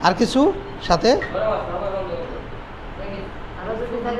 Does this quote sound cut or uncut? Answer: uncut